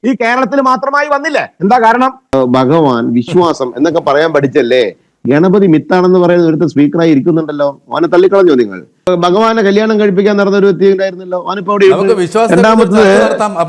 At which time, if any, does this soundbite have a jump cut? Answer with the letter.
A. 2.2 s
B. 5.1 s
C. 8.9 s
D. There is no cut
A